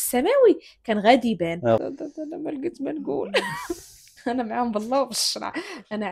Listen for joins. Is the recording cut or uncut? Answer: cut